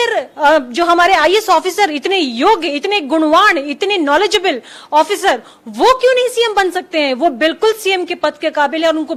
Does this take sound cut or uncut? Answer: uncut